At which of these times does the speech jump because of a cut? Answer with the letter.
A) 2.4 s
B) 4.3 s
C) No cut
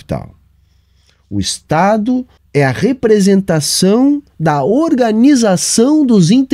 A